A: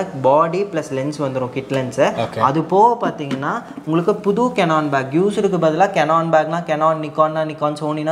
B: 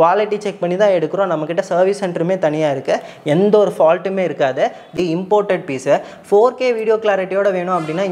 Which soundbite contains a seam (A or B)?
B